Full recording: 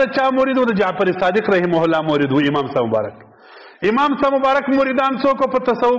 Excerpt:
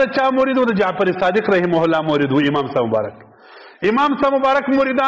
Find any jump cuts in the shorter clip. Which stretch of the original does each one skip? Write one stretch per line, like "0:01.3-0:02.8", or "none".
none